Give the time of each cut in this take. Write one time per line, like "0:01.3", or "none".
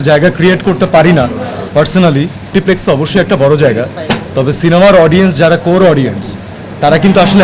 0:02.5

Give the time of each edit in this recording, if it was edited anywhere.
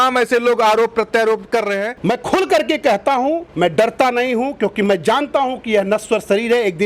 0:01.9

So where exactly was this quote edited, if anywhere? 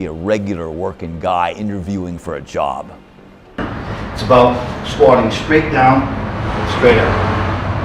0:03.6

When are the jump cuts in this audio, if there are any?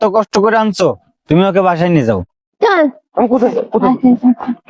0:02.3

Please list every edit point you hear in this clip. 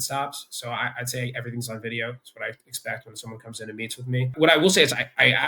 0:04.3

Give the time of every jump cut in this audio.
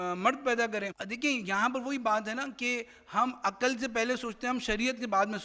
0:01.0

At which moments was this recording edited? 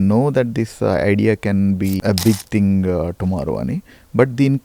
0:02.0

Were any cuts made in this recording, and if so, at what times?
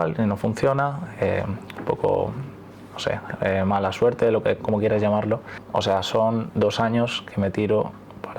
0:05.5

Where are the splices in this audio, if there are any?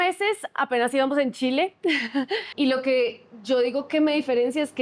0:02.5

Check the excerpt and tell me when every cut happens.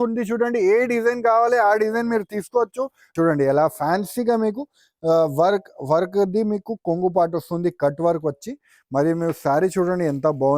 0:03.1

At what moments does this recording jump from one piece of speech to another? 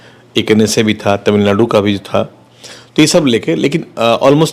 none

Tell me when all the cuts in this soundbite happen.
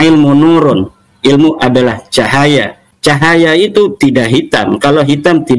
0:02.8

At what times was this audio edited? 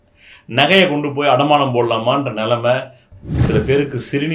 0:03.0

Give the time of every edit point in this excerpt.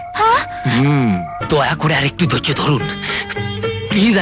0:01.4

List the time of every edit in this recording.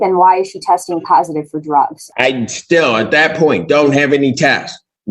0:02.0

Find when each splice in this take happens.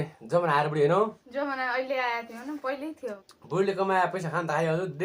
0:01.2
0:03.2

